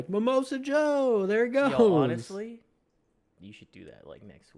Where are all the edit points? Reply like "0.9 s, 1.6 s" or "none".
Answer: none

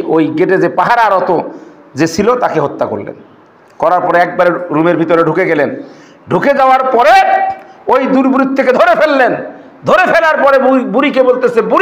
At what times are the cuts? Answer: none

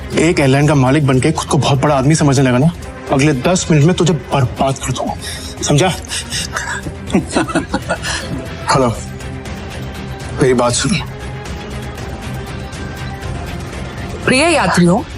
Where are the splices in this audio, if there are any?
2.9 s, 8.1 s, 12.0 s

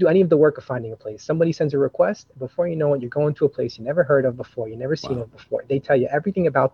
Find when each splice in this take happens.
none

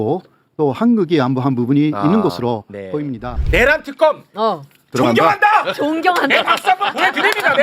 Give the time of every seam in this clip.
3.4 s

